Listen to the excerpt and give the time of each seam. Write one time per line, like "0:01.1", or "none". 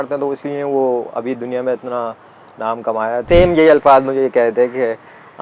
0:03.2